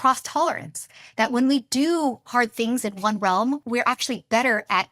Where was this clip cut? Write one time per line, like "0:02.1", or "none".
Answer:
0:03.6